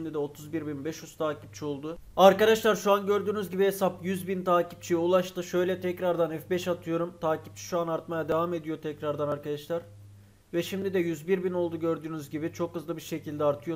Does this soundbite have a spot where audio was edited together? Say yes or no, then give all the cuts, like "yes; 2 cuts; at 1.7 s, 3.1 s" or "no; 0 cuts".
yes; 1 cut; at 2.0 s